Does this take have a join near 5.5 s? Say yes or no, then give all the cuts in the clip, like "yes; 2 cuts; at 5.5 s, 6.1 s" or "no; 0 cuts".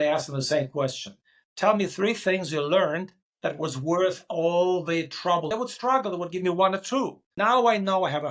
yes; 2 cuts; at 5.5 s, 7.2 s